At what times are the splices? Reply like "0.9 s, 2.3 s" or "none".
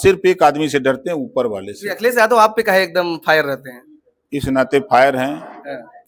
none